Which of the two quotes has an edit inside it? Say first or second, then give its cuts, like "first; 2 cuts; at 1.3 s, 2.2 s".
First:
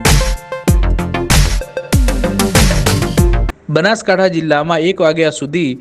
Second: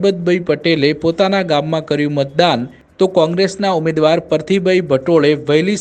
first; 1 cut; at 3.5 s